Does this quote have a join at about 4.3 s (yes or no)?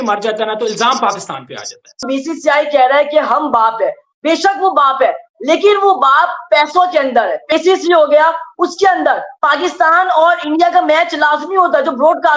no